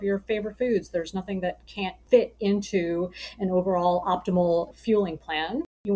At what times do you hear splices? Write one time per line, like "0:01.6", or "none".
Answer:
0:02.0